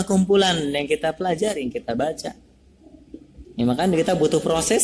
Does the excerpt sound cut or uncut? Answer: uncut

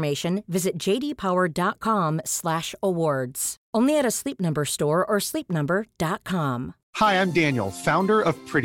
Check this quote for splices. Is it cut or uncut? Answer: cut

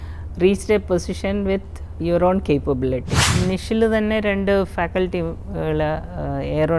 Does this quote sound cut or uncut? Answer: cut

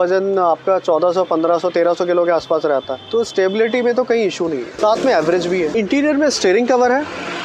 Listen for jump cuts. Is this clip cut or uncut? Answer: cut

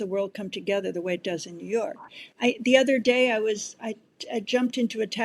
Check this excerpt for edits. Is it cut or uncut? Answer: uncut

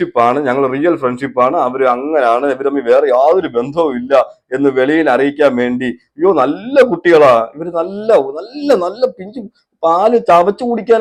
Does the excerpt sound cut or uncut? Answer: uncut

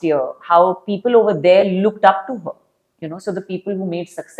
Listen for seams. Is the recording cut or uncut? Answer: uncut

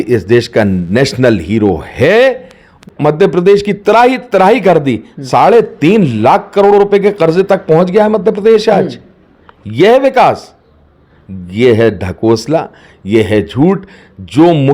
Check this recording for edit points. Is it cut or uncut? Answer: cut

